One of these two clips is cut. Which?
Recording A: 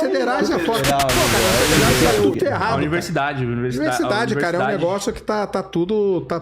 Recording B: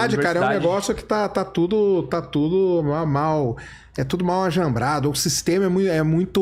A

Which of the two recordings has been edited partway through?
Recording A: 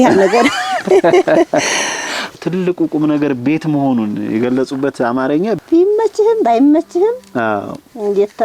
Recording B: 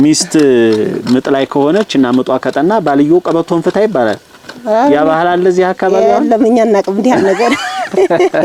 A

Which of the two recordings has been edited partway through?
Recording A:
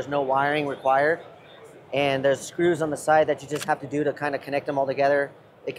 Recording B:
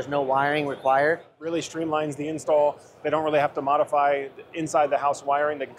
B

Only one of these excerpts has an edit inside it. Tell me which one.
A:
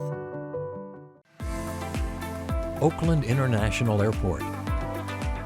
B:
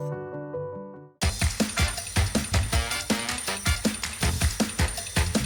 A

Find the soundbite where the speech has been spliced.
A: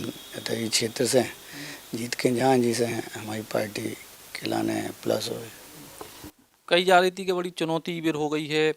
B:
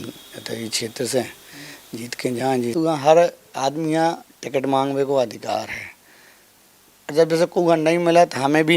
B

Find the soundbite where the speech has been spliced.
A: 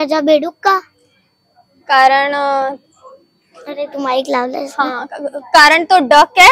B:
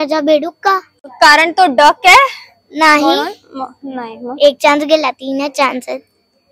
B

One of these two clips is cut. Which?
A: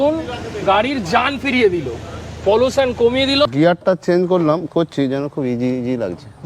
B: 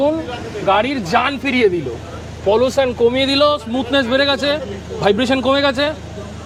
A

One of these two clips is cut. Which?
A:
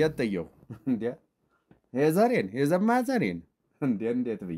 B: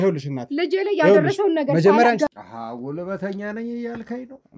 B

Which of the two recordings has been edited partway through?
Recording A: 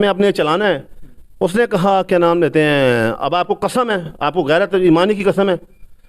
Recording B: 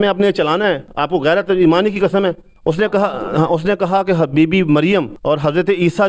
B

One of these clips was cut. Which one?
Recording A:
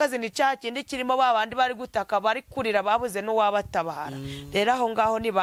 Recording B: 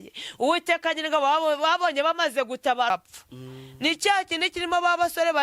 B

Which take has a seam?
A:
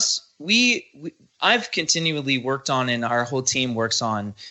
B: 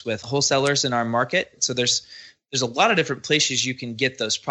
B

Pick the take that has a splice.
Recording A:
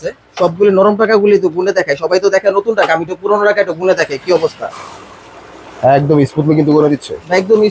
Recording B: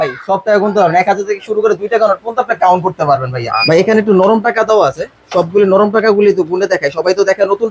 B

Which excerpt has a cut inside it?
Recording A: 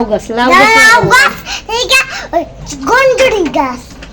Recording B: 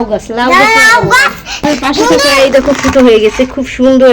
B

